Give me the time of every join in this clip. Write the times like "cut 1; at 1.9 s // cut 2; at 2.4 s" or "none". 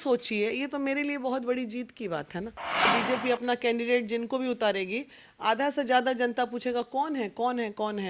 cut 1; at 2.9 s